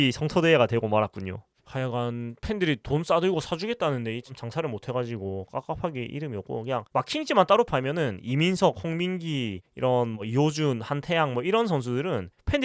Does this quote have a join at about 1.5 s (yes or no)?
yes